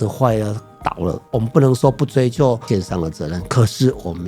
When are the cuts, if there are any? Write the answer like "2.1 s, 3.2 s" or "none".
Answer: 1.2 s, 2.6 s